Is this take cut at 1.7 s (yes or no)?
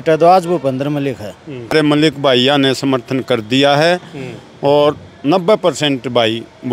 yes